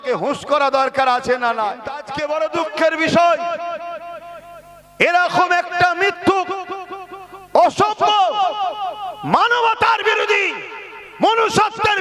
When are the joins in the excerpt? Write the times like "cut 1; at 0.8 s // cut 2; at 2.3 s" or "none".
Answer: cut 1; at 2.1 s